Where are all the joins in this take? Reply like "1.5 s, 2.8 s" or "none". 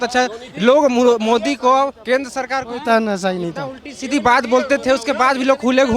none